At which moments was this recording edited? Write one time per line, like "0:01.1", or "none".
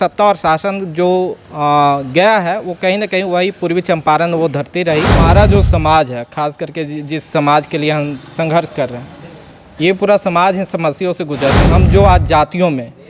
0:05.2
0:11.6